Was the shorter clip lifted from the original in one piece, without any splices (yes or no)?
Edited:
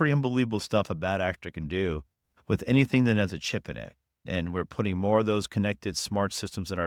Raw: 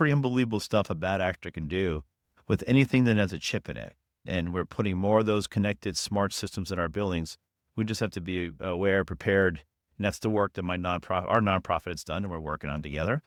yes